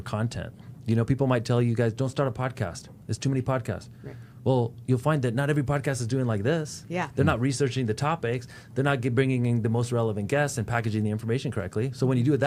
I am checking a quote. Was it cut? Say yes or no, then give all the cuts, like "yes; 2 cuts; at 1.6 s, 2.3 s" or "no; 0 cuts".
no; 0 cuts